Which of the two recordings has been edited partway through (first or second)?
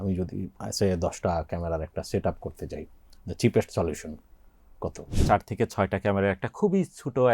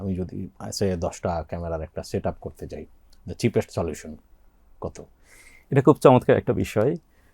first